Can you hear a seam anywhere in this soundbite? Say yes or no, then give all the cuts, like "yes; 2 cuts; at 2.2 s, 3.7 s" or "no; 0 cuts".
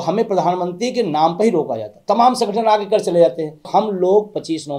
yes; 1 cut; at 3.7 s